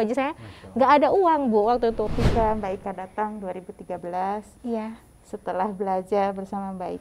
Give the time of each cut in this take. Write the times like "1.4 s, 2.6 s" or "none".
2.1 s